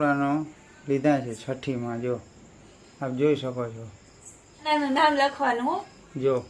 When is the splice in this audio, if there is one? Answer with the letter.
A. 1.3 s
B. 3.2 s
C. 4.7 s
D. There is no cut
C